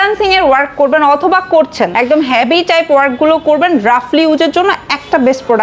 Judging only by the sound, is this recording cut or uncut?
uncut